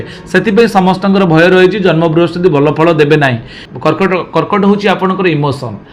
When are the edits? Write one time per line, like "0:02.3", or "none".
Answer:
0:03.6